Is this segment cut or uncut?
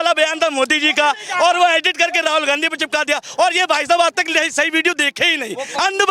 uncut